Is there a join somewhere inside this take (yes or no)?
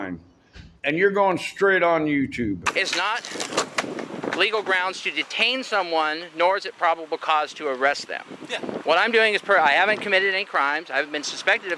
yes